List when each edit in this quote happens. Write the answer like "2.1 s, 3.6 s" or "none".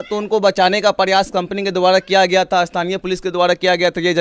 none